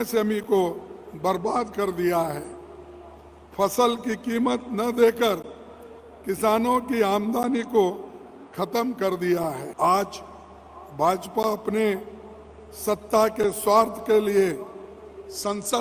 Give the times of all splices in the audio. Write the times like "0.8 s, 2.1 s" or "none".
9.7 s